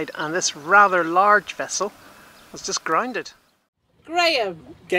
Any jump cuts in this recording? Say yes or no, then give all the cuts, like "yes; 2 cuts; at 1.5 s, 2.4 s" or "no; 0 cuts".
yes; 1 cut; at 4.0 s